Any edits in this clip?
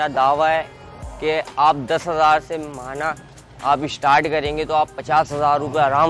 no; 0 cuts

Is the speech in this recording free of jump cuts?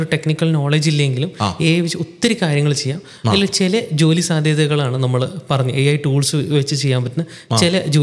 yes; 0 cuts

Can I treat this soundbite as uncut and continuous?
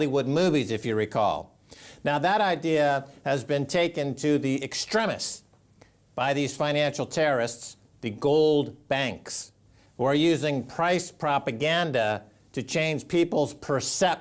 no; 1 cut; at 7.0 s

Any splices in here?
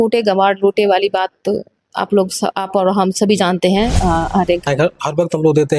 yes; 1 cut; at 4.7 s

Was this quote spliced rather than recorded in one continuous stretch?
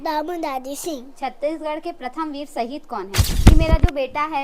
yes; 1 cut; at 3.3 s

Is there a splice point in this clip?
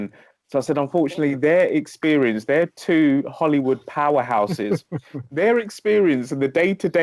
no; 0 cuts

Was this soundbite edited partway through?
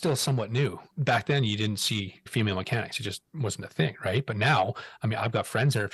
yes; 2 cuts; at 0.8 s, 2.2 s

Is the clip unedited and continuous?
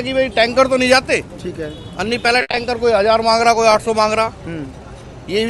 yes; 0 cuts

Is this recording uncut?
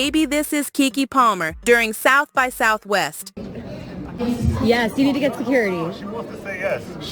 no; 1 cut; at 3.4 s

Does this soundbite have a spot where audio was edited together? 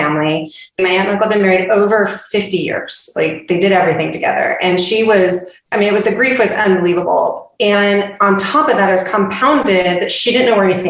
yes; 2 cuts; at 0.8 s, 5.7 s

